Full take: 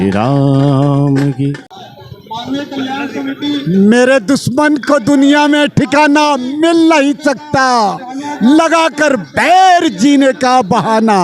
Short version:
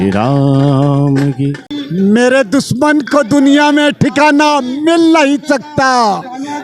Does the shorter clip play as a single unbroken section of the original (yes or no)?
no